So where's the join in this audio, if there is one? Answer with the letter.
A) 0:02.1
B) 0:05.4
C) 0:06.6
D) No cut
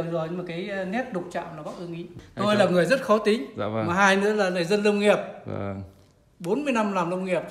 A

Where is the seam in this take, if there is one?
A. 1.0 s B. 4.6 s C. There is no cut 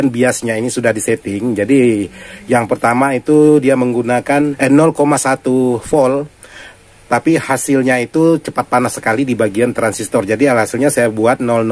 B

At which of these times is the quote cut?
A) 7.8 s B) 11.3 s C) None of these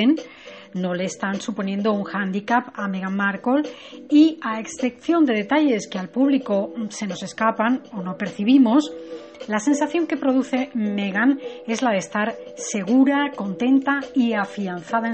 B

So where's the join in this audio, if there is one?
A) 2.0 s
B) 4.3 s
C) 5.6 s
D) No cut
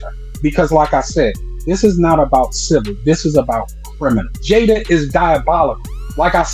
B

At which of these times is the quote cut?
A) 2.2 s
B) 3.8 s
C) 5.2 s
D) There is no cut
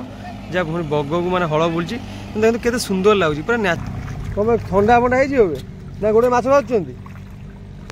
B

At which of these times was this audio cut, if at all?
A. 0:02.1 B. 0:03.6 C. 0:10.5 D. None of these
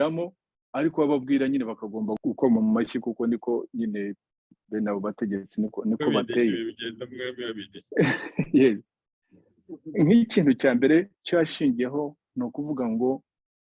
A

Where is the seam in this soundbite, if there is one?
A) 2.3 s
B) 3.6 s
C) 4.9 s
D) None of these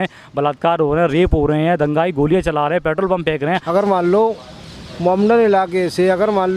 B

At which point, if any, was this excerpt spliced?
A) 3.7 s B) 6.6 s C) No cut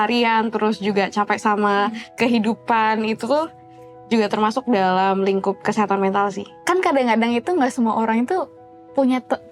B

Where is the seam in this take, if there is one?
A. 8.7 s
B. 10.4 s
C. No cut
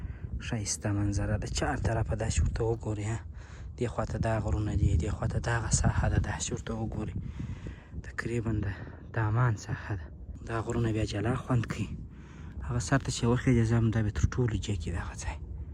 B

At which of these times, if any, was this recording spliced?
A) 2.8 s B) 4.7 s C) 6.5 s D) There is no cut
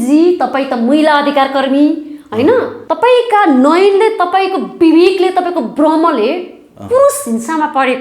A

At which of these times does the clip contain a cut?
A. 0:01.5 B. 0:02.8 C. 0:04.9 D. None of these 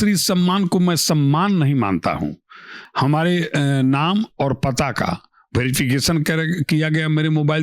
B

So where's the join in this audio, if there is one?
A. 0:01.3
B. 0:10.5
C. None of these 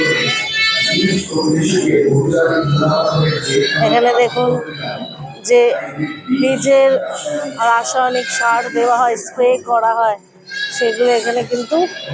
C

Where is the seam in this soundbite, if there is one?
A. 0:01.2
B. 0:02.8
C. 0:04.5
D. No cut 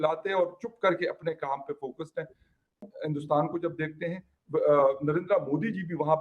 B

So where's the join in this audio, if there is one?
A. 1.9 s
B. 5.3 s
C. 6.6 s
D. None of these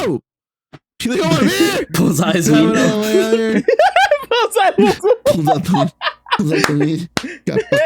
A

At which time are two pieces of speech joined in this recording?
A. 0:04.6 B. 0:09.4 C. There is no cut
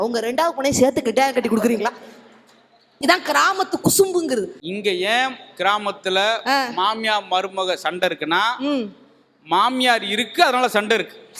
A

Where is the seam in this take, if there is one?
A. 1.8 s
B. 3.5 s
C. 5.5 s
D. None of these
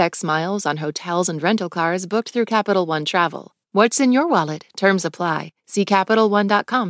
B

